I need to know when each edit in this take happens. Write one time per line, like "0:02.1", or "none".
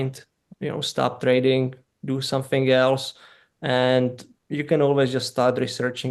none